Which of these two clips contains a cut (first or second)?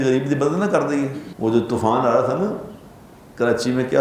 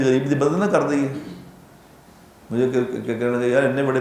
first